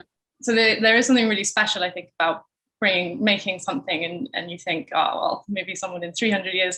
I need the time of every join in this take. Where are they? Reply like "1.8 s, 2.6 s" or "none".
none